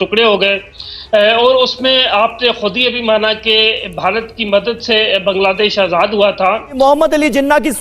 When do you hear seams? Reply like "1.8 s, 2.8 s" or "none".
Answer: 6.7 s